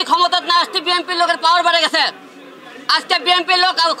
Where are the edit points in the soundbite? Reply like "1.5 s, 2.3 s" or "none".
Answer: none